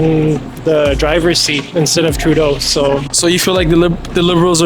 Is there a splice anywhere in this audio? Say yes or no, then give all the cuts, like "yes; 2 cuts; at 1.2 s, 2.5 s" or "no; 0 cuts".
yes; 1 cut; at 3.1 s